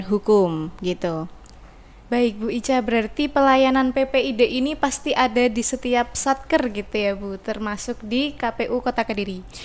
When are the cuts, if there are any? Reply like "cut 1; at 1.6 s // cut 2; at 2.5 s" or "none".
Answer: none